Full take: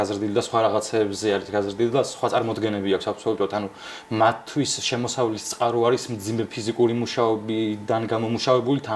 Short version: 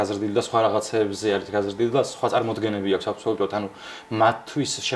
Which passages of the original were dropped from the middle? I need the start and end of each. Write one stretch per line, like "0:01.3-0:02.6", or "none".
none